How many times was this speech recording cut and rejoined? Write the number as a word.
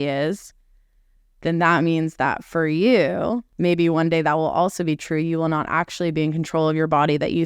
one